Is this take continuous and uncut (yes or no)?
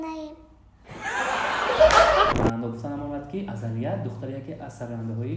no